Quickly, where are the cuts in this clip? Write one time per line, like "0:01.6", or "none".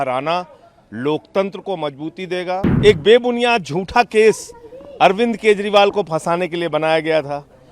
0:02.6